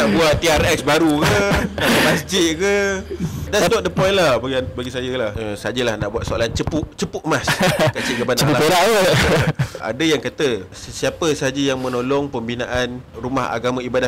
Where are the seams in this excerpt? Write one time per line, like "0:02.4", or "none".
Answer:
0:03.4
0:05.3
0:09.9
0:10.8
0:13.2